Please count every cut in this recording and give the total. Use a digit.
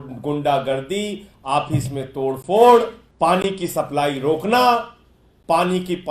1